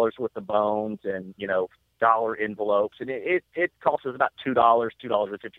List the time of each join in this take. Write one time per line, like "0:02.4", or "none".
none